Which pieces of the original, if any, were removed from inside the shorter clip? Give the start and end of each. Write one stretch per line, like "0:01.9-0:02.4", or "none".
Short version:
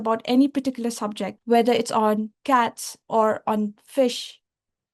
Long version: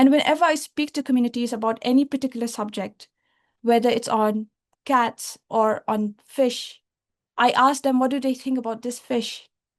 0:02.9-0:03.5
0:04.5-0:04.7